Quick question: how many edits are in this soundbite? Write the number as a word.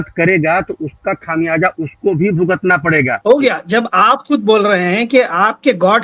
one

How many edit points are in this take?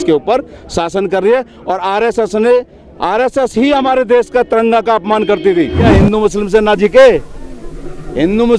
one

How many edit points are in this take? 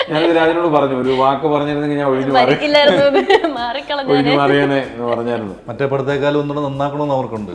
one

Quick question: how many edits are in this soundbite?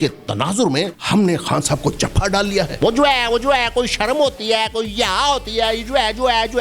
two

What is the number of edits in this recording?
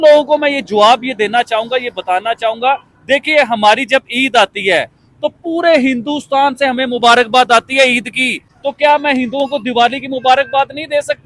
one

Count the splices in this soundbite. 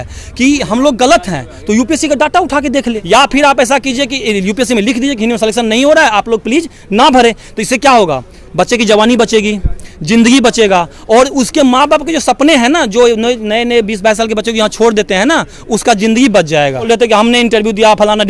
two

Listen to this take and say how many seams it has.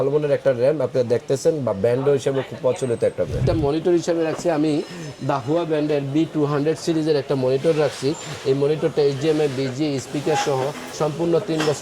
one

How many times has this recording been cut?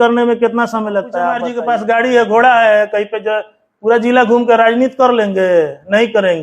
one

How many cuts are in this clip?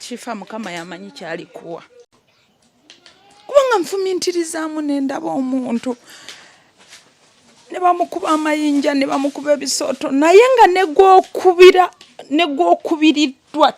one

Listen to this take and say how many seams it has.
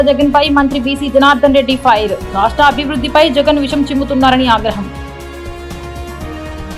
zero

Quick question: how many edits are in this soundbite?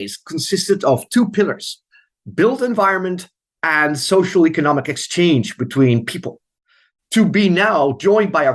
zero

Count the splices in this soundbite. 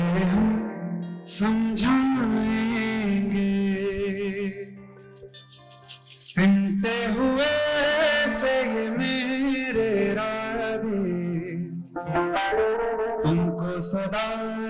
zero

